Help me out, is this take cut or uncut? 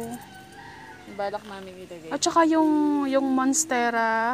uncut